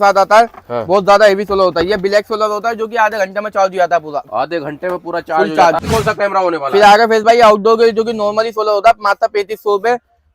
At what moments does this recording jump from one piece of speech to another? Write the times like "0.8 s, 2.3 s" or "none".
5.9 s

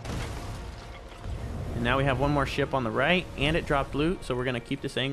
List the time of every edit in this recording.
1.7 s

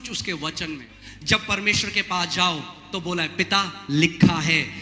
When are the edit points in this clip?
0.9 s

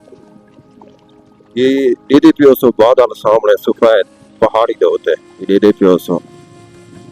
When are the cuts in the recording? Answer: 5.3 s

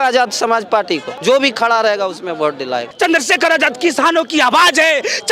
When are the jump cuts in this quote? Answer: 1.1 s, 2.9 s

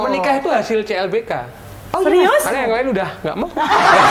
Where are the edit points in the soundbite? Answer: none

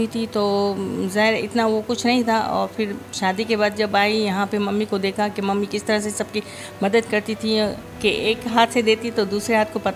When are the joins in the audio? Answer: none

